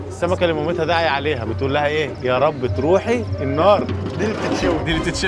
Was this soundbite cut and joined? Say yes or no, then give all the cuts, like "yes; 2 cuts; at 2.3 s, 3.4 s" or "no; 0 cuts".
yes; 1 cut; at 4.0 s